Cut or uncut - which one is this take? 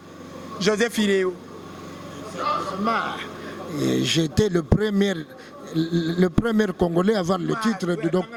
uncut